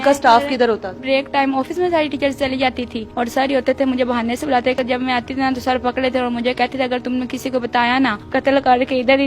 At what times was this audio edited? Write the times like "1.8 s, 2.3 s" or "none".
1.0 s, 3.3 s, 4.8 s, 8.2 s